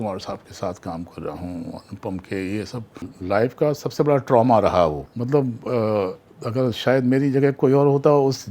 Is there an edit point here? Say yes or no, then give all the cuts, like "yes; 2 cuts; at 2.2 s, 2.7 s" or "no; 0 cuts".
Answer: yes; 2 cuts; at 3.1 s, 5.1 s